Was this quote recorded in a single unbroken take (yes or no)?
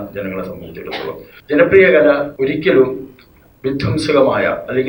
no